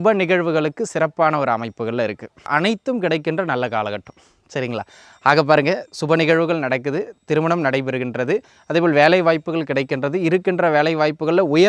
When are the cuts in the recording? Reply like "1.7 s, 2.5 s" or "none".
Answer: 2.5 s